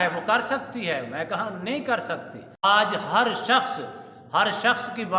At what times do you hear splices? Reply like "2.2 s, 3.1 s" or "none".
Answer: 2.6 s